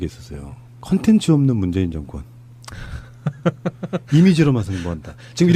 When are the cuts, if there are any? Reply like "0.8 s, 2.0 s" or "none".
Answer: 1.9 s